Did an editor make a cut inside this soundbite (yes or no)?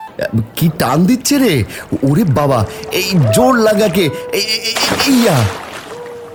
no